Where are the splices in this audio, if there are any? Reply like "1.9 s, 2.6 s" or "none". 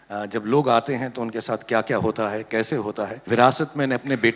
3.1 s